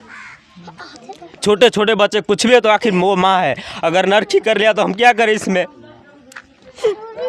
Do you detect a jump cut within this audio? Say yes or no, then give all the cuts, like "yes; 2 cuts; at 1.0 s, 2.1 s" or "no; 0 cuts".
no; 0 cuts